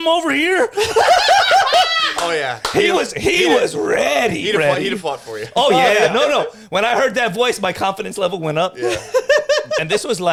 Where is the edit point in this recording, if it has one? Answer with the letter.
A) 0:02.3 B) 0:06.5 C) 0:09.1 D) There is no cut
D